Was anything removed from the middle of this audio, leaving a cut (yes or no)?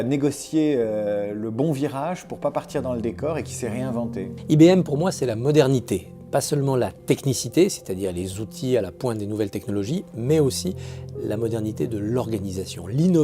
yes